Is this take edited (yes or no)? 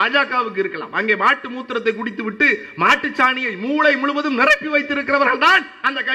no